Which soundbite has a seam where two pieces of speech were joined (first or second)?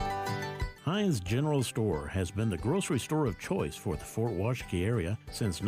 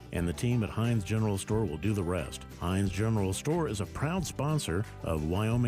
first